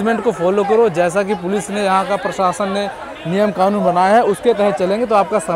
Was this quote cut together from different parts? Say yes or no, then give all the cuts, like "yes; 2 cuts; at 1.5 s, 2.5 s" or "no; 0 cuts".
no; 0 cuts